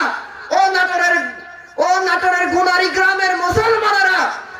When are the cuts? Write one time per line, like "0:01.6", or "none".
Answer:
none